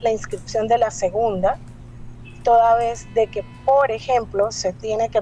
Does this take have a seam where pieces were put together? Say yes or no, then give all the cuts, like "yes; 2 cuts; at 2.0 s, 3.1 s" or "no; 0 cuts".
no; 0 cuts